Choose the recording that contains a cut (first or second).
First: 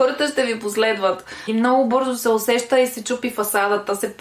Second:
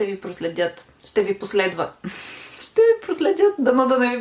first